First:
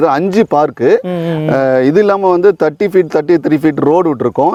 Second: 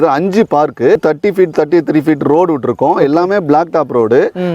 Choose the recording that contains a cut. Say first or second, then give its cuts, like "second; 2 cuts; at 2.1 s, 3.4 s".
second; 1 cut; at 1.0 s